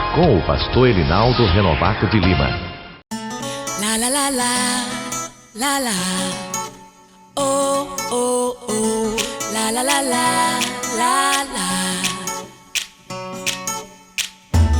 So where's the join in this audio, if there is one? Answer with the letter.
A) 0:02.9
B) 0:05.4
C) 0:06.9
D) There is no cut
A